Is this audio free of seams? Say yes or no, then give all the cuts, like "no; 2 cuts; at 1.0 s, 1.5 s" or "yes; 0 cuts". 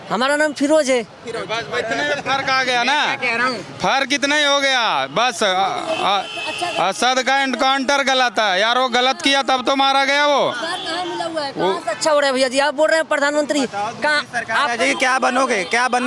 yes; 0 cuts